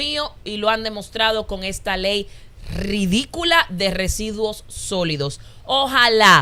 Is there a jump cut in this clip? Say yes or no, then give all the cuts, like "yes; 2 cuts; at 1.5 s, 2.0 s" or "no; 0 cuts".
no; 0 cuts